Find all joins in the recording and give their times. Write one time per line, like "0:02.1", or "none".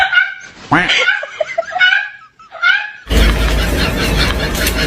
0:03.0